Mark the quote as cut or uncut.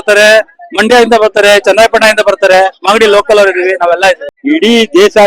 cut